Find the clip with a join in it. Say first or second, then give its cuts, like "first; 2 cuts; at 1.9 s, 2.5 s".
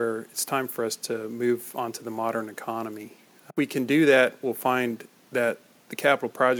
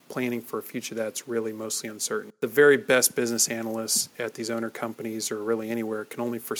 second; 1 cut; at 2.3 s